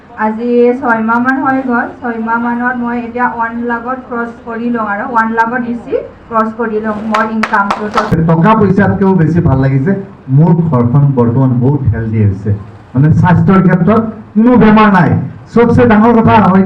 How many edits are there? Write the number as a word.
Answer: one